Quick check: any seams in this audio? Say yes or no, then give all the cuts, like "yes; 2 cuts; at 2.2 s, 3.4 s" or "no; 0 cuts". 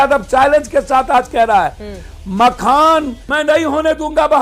yes; 2 cuts; at 1.8 s, 3.2 s